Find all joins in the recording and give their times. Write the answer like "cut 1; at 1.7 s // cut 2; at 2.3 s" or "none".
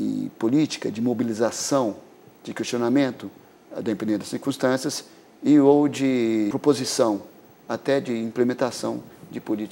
cut 1; at 6.5 s

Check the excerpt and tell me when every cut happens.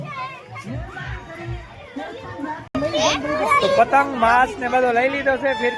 cut 1; at 2.7 s

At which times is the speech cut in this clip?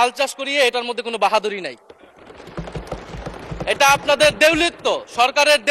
none

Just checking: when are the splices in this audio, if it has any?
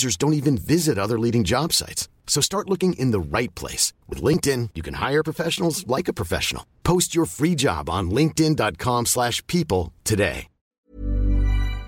cut 1; at 10.8 s

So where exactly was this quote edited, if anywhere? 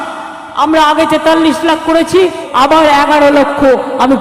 cut 1; at 2.4 s

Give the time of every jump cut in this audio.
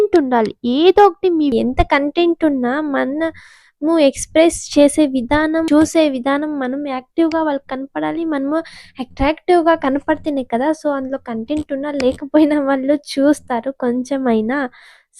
cut 1; at 1.5 s // cut 2; at 5.7 s

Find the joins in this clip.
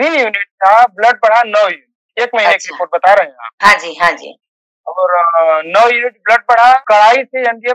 cut 1; at 6.8 s

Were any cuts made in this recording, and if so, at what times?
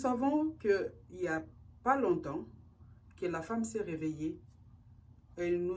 none

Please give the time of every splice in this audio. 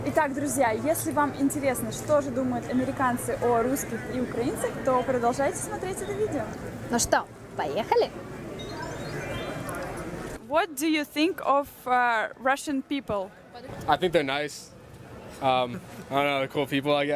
none

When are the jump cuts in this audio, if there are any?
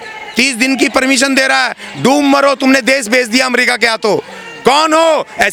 none

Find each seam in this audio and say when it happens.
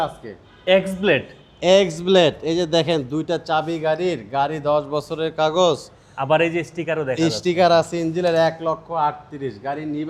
none

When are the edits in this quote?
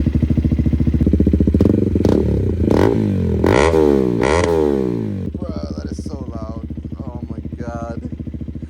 cut 1; at 1.0 s // cut 2; at 5.3 s

